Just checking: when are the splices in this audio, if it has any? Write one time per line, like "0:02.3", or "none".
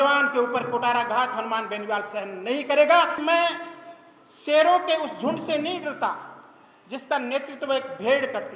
0:03.2